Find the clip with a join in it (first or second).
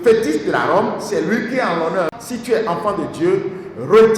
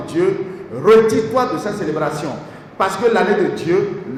first